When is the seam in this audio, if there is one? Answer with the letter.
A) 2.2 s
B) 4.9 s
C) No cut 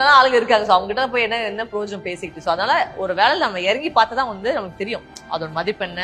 C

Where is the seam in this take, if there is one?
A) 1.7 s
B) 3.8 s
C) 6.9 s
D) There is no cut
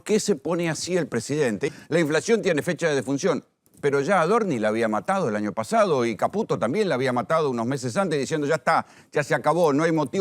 A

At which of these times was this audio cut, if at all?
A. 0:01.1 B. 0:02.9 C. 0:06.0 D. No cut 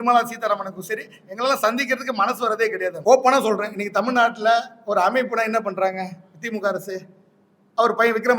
B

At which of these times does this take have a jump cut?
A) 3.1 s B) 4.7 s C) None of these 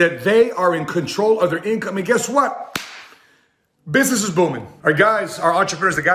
B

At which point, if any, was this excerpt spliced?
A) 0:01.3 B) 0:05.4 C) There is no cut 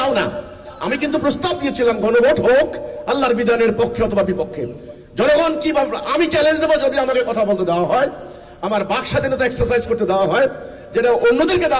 C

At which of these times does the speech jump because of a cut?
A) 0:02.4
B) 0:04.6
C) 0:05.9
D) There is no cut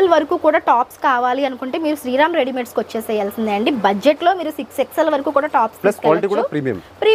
D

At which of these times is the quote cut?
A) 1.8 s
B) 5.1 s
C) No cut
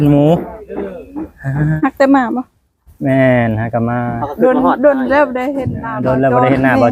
A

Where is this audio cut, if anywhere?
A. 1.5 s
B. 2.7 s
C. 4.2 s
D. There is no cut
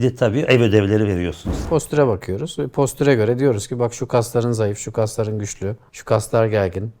A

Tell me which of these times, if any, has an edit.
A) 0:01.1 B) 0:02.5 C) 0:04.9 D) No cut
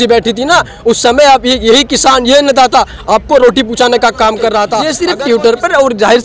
C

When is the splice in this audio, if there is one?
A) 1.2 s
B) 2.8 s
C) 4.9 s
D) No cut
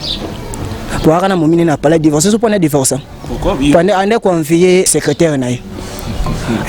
C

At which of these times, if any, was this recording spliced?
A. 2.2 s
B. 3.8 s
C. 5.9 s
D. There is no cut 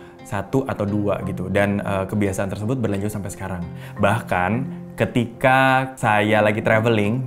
C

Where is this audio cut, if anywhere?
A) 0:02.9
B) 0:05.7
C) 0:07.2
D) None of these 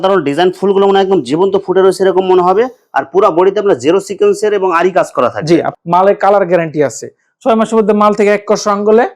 B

